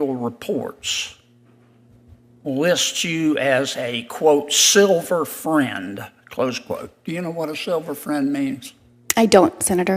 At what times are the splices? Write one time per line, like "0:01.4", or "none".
none